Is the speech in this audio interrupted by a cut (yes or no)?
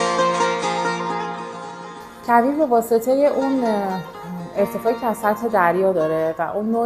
no